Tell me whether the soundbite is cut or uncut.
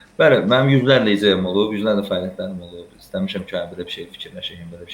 uncut